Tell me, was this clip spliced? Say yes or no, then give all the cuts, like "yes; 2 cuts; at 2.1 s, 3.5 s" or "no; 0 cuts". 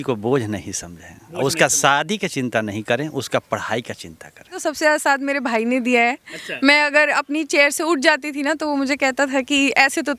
yes; 1 cut; at 4.6 s